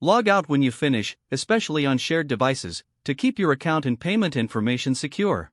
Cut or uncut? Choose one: uncut